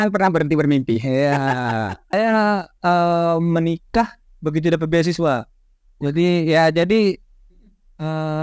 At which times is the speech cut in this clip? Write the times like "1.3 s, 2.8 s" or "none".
2.1 s